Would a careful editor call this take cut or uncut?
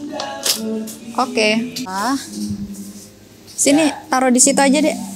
cut